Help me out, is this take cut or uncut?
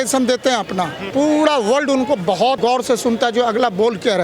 cut